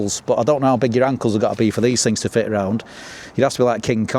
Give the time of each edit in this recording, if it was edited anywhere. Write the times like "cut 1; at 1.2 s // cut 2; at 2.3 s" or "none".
none